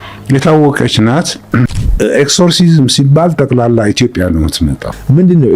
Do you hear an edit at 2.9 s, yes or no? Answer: no